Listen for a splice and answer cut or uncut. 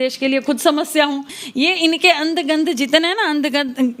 cut